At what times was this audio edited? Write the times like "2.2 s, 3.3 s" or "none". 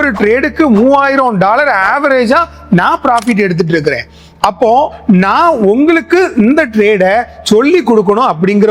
none